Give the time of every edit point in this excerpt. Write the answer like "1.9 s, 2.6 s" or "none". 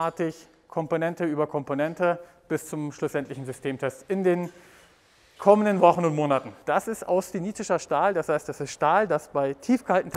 6.5 s